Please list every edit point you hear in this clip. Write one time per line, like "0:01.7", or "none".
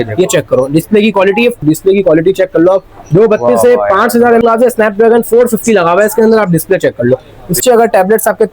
0:01.6
0:04.4
0:07.6